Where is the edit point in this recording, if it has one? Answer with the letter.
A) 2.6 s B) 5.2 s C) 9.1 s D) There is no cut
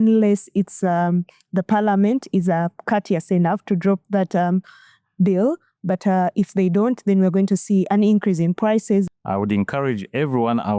C